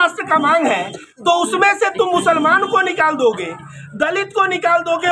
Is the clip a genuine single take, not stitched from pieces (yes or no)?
yes